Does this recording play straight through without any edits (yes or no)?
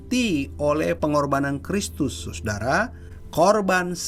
yes